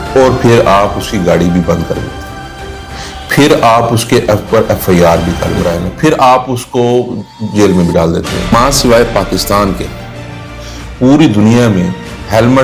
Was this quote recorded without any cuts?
no; 2 cuts; at 5.6 s, 8.5 s

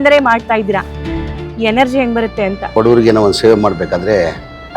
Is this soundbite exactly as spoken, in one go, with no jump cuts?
no; 1 cut; at 2.7 s

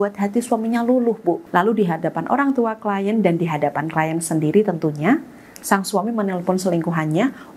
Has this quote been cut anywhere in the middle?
yes; 1 cut; at 1.4 s

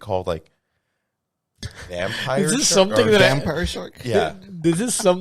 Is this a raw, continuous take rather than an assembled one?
yes; 0 cuts

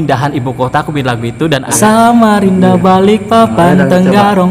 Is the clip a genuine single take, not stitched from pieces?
no; 1 cut; at 1.7 s

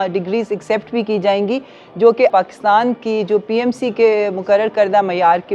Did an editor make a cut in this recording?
yes; 1 cut; at 2.3 s

